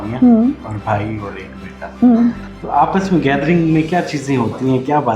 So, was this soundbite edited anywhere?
yes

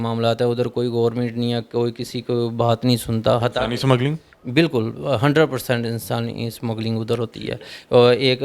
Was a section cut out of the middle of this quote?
no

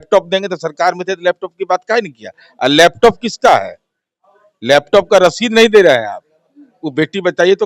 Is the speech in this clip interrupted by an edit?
no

